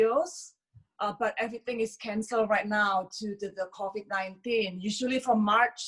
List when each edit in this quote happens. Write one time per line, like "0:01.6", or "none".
none